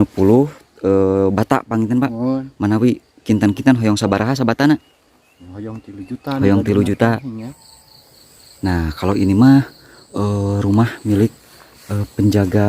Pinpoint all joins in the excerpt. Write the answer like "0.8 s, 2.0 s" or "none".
7.4 s